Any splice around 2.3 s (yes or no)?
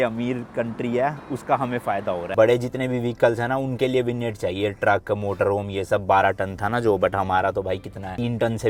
no